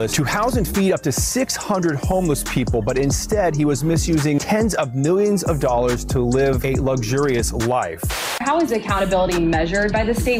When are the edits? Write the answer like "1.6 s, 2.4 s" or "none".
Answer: none